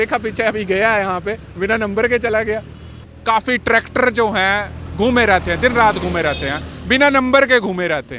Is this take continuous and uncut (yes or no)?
no